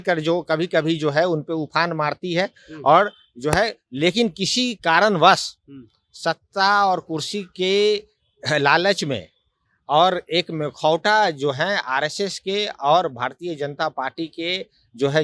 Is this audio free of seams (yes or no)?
yes